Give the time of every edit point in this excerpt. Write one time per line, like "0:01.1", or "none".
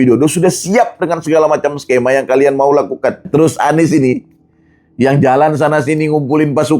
0:03.2

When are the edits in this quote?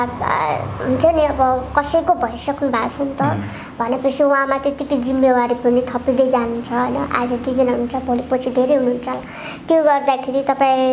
none

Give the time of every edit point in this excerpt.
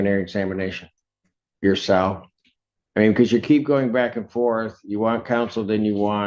none

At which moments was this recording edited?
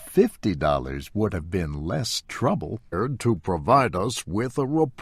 none

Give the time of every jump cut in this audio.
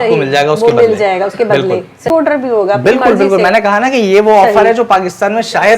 0:02.1

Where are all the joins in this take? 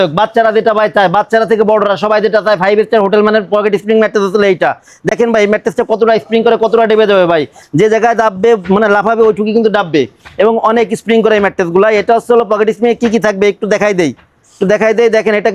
none

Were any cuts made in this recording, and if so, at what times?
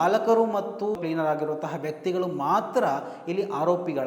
0:01.0

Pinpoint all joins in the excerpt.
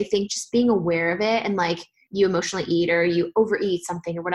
0:02.0

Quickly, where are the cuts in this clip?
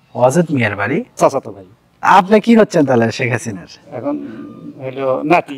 0:01.2

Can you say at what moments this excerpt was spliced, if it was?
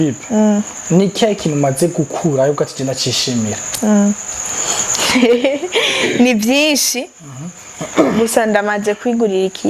none

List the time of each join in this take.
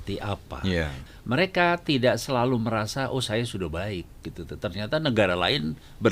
0:01.0

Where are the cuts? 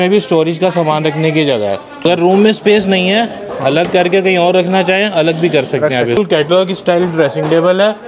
0:02.0
0:06.2

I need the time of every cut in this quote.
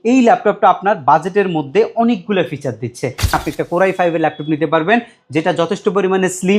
0:03.3

